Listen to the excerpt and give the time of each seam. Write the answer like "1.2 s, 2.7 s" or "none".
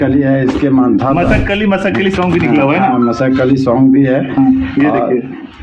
none

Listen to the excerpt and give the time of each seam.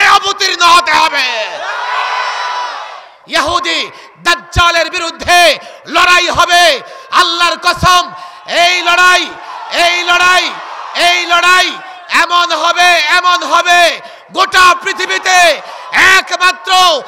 3.1 s

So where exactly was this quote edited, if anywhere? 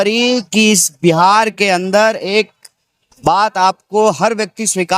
none

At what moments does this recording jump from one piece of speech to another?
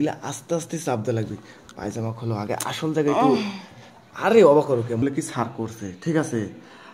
5.0 s

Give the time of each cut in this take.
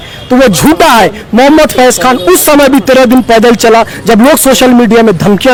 none

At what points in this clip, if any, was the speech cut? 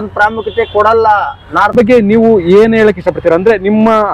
1.7 s

